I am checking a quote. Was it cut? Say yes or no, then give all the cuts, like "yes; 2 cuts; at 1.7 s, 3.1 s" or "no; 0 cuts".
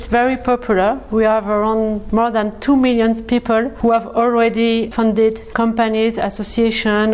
yes; 3 cuts; at 2.0 s, 3.7 s, 5.4 s